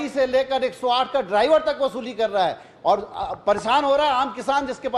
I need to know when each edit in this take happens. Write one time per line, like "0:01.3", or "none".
none

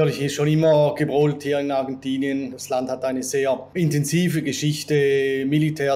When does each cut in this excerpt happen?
0:02.5
0:03.7

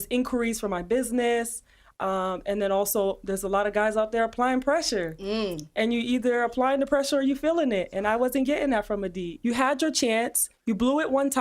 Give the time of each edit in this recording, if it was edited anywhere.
0:09.3

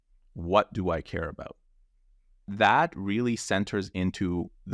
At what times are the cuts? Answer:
0:02.5

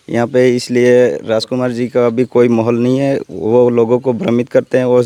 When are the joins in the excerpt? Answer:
none

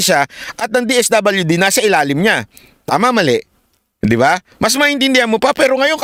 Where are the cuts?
none

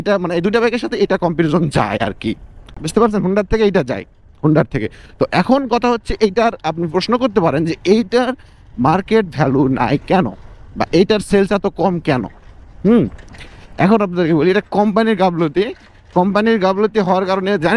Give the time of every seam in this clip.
none

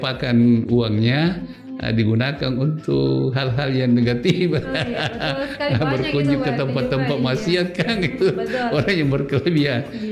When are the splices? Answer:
none

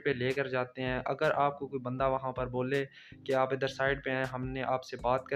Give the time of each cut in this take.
none

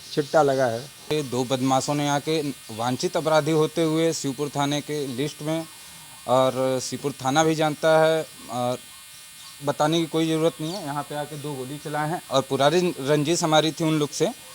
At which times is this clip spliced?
0:01.1

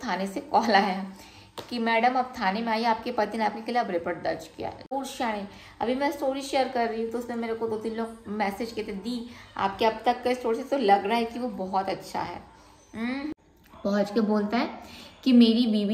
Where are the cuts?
0:04.8
0:13.4

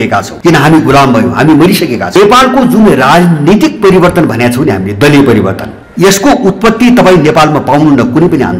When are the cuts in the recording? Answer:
0:02.1

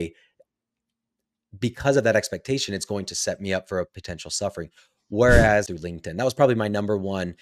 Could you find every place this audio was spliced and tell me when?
0:05.8

